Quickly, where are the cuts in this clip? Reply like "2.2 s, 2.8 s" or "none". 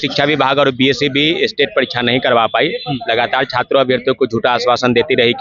none